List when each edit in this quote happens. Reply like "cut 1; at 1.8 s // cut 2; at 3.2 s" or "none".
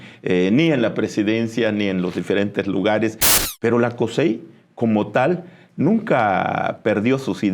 cut 1; at 3.3 s